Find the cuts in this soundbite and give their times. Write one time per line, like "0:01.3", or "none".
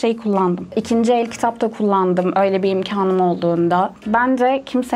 0:00.7
0:04.0